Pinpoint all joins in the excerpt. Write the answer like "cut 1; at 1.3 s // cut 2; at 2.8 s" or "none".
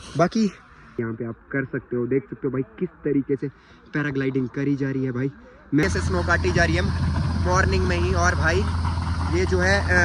cut 1; at 1.0 s // cut 2; at 5.8 s